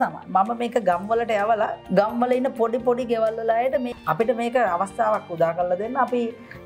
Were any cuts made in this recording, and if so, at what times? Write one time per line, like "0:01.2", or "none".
0:01.8
0:03.9